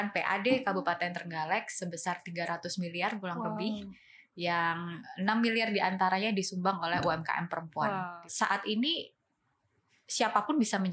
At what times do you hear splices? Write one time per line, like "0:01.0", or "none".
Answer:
0:08.2